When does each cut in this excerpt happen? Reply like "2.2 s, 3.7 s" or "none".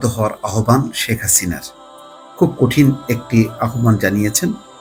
none